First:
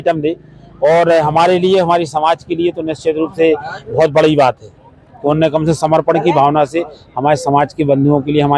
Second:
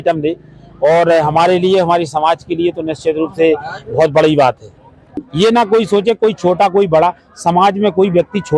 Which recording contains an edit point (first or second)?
second